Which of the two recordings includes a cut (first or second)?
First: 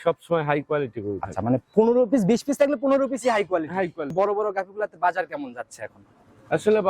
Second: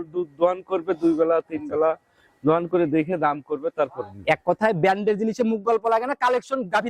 first